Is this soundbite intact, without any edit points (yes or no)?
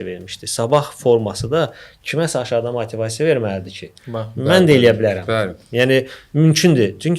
yes